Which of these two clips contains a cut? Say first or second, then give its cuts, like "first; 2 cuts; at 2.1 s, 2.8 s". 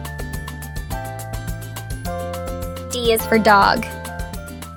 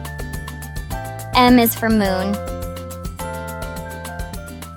second; 3 cuts; at 1.3 s, 2.4 s, 3.9 s